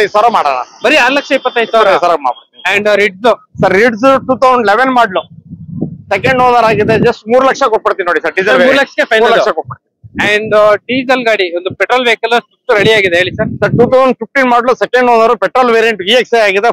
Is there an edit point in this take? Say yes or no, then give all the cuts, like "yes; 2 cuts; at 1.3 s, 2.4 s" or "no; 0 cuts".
no; 0 cuts